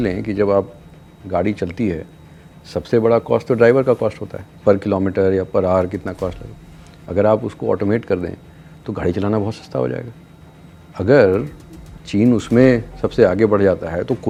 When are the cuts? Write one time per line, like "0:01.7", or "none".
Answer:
none